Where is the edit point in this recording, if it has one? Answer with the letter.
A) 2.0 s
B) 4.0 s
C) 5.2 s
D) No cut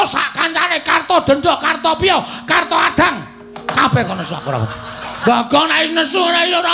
C